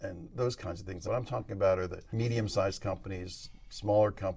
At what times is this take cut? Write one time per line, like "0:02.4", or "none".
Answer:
0:00.9
0:02.0